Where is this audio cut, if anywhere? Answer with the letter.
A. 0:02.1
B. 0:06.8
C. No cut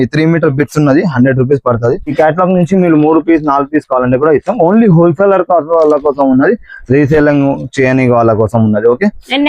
A